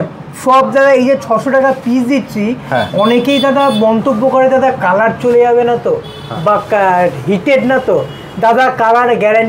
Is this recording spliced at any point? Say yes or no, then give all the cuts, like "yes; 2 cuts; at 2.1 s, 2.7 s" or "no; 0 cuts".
no; 0 cuts